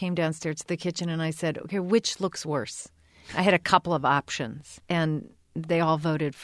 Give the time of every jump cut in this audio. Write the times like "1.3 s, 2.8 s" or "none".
4.8 s